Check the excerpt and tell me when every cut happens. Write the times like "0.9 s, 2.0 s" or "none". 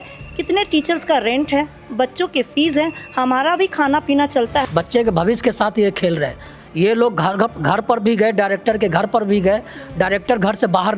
4.6 s

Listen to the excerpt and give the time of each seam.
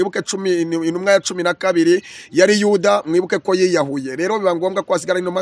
none

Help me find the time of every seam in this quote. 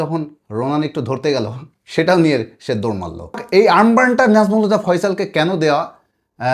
3.4 s

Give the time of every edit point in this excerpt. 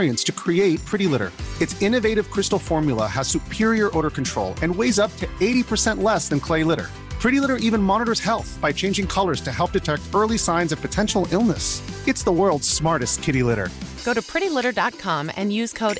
none

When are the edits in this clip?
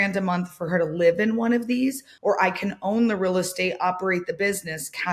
none

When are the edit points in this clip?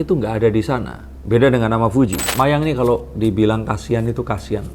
2.2 s

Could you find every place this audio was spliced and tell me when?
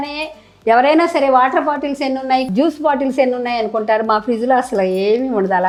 none

